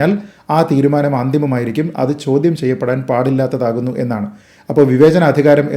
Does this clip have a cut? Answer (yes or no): no